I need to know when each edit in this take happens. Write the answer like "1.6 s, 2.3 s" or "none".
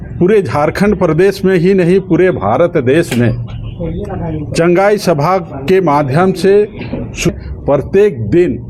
7.3 s